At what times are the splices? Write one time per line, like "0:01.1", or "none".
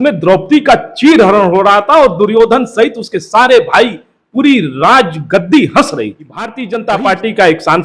0:06.6